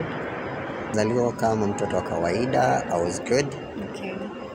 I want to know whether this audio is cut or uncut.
cut